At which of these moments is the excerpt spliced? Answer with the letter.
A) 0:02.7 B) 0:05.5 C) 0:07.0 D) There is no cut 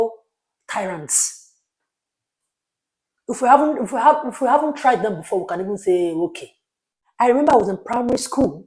C